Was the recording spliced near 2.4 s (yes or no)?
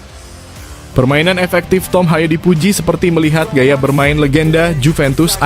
no